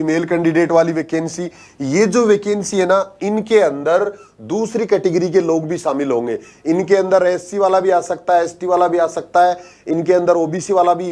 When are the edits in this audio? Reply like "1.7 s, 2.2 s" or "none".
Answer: none